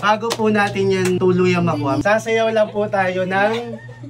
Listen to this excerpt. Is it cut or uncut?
cut